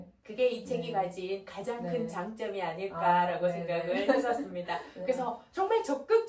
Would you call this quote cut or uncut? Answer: uncut